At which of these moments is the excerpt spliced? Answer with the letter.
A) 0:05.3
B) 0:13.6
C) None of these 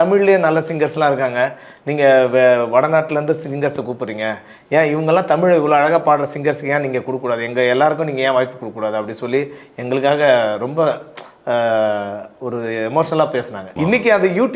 B